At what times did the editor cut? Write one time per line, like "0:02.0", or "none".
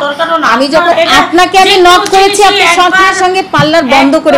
0:00.9